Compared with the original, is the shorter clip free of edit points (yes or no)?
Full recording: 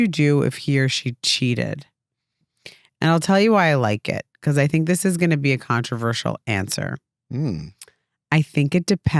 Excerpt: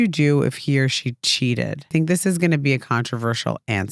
no